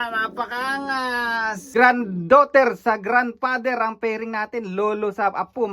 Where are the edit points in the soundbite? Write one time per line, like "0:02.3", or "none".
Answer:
0:01.6